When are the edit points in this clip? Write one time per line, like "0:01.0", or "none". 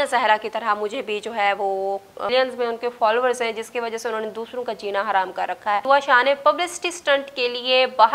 0:02.3
0:05.8